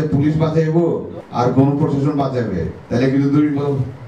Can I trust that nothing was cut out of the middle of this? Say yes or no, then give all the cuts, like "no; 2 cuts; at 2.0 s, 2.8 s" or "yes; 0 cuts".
no; 1 cut; at 1.2 s